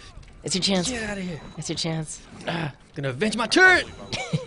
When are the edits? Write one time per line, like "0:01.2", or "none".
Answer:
0:02.2